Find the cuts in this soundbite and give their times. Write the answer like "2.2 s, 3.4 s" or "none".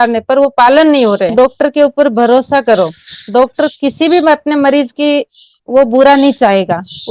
1.3 s